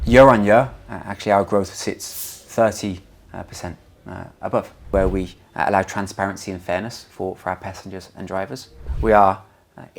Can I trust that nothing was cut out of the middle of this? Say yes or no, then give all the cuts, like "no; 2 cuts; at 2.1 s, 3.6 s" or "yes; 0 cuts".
no; 2 cuts; at 4.9 s, 8.9 s